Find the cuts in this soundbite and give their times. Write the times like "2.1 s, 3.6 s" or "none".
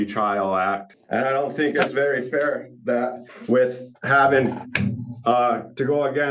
0.9 s